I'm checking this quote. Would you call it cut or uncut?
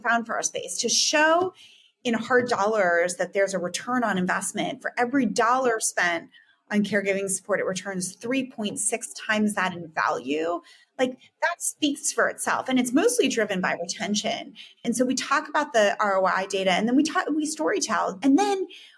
cut